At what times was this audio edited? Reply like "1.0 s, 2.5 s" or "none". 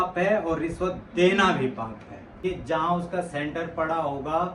2.4 s